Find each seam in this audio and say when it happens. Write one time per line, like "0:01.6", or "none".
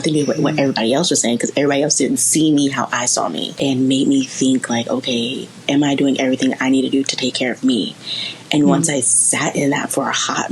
0:03.5